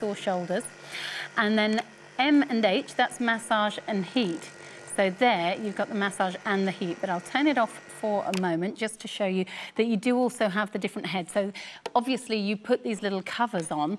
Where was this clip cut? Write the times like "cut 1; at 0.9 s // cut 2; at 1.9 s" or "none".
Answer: cut 1; at 8.9 s